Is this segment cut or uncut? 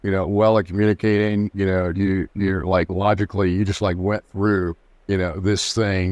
uncut